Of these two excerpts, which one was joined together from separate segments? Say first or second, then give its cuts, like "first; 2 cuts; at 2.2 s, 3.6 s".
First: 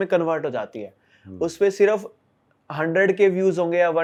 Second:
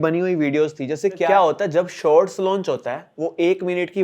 second; 1 cut; at 1.3 s